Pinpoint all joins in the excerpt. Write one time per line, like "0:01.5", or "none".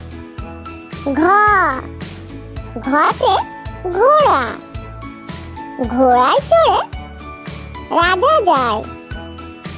0:08.9